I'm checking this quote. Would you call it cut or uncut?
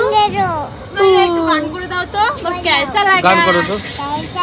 uncut